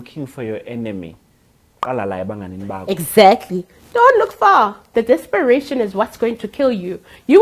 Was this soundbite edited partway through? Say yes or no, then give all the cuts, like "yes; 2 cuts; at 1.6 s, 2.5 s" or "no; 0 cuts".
yes; 1 cut; at 4.9 s